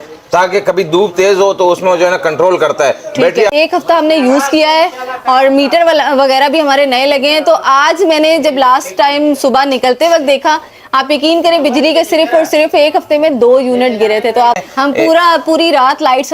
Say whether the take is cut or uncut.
cut